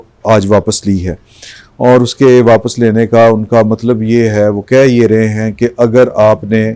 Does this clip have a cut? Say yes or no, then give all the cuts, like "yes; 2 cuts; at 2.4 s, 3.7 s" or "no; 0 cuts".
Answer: no; 0 cuts